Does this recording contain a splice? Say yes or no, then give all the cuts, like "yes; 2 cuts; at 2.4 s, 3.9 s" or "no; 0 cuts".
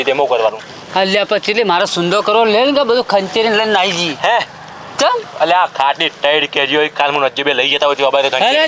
no; 0 cuts